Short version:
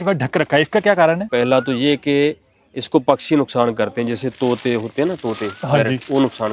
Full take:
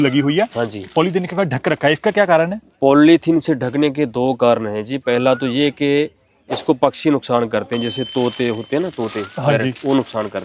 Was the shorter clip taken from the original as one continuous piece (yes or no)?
no